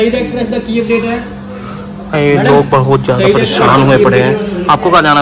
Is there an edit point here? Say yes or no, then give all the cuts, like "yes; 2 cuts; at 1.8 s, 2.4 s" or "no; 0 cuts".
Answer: no; 0 cuts